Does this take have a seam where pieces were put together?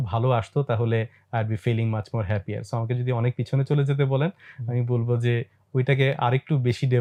no; 0 cuts

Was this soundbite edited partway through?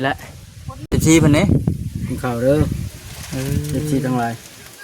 yes; 1 cut; at 0.9 s

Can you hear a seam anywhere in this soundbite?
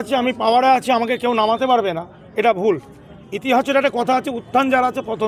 no; 0 cuts

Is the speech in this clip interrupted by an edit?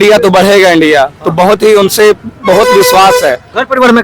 no; 0 cuts

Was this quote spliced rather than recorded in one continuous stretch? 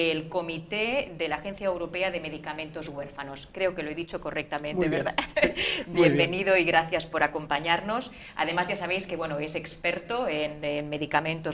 yes; 1 cut; at 9.5 s

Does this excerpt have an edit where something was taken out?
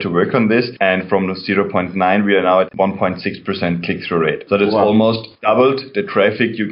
no; 0 cuts

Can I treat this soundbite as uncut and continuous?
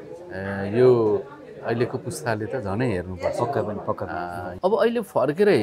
no; 1 cut; at 4.5 s

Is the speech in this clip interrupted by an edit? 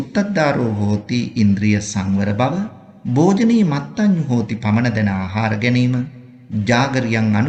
no; 0 cuts

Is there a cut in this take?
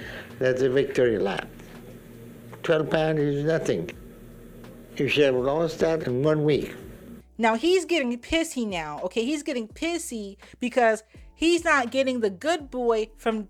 no; 0 cuts

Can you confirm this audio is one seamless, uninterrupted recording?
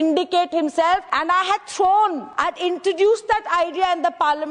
no; 2 cuts; at 1.1 s, 2.3 s

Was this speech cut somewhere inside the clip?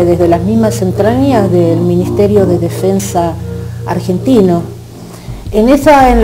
no; 0 cuts

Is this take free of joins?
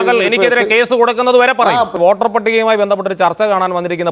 no; 1 cut; at 1.9 s

